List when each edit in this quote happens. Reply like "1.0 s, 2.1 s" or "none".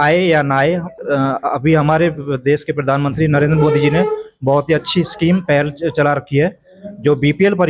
1.0 s